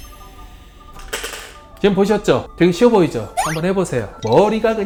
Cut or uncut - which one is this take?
uncut